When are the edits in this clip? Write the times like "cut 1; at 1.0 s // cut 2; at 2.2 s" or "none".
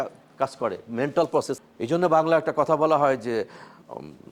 cut 1; at 1.6 s